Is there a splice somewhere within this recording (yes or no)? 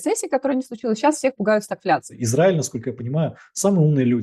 yes